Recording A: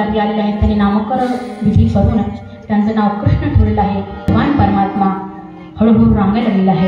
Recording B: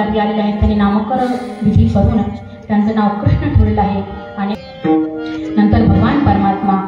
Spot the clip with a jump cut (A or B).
A